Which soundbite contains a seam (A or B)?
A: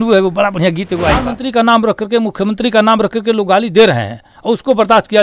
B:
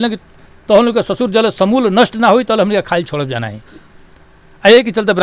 A